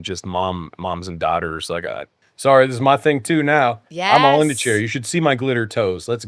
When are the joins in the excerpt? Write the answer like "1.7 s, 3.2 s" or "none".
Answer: 2.2 s